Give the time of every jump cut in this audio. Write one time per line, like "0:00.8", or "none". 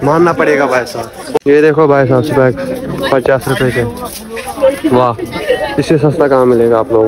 0:01.4